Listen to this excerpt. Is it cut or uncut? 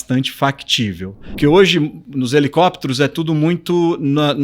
cut